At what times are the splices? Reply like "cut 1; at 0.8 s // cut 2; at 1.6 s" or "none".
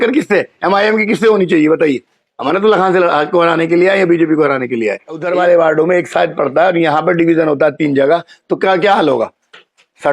cut 1; at 5.2 s